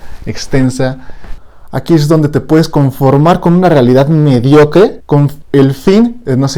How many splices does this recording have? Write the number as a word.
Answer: one